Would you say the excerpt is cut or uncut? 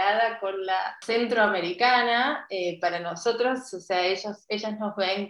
cut